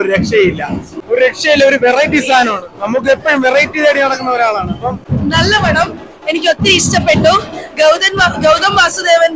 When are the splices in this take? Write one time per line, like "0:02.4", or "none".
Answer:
0:00.9
0:05.0

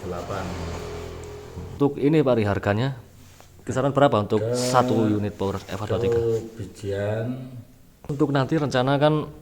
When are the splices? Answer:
0:01.8
0:08.1

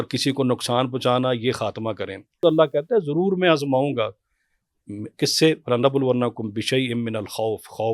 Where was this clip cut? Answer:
0:02.4

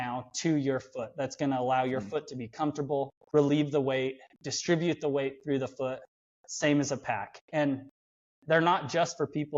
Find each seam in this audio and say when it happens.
0:03.2

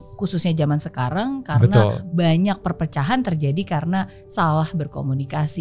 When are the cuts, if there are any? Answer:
none

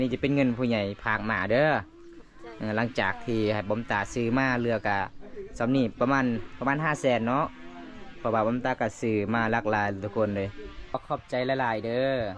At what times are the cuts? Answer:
0:11.0

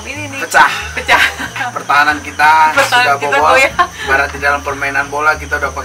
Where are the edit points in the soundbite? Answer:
0:01.7
0:04.0

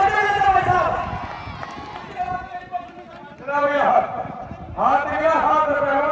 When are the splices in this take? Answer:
none

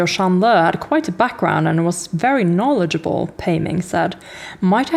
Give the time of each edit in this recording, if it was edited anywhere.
none

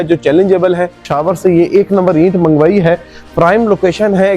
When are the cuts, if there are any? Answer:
0:00.9
0:03.2

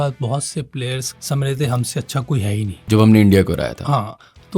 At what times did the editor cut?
0:01.1
0:02.8

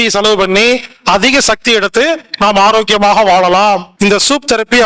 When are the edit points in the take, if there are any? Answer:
0:03.9

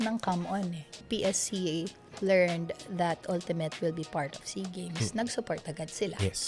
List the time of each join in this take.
0:01.0

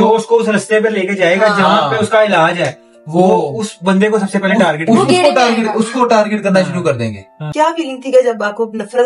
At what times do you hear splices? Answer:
0:07.4

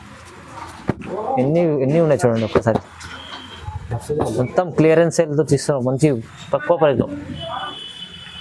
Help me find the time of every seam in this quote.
none

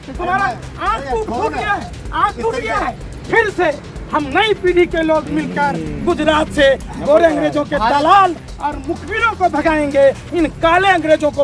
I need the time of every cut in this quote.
0:03.1

